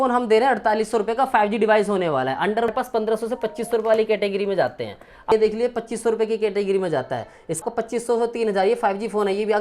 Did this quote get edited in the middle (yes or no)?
yes